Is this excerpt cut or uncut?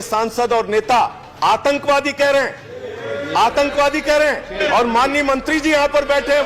cut